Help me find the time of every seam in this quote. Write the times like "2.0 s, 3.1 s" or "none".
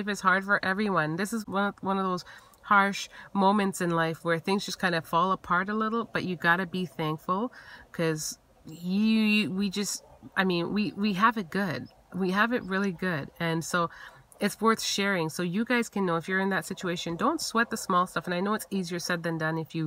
1.4 s